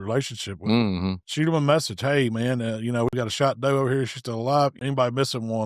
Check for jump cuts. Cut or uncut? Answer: cut